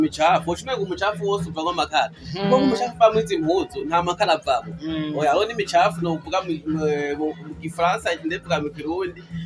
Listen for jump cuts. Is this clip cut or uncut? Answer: uncut